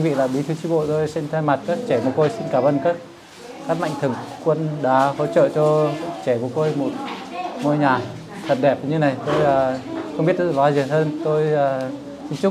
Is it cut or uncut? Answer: uncut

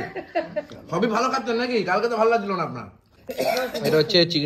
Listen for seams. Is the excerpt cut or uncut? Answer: cut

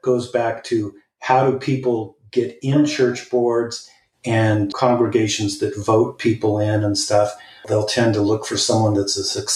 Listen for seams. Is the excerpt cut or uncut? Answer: cut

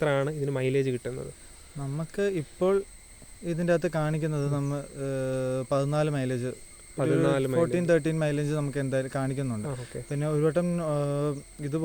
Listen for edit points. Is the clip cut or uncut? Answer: uncut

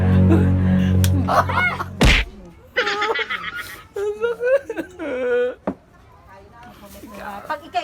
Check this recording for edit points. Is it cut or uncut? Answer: uncut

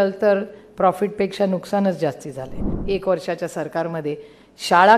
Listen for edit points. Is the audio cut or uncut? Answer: cut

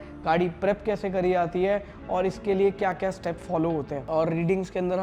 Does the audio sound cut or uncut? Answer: cut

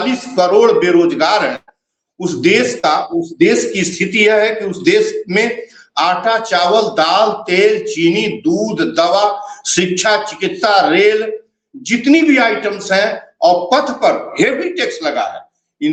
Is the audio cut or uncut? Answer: uncut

